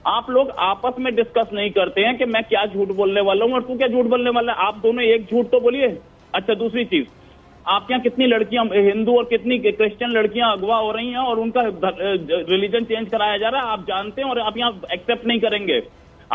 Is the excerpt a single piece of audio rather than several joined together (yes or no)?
yes